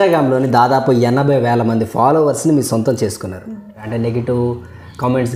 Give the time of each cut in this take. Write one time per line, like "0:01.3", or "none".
0:03.8